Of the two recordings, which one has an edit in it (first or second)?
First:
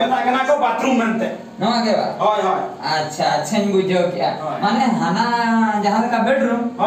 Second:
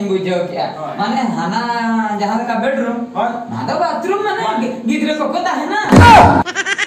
second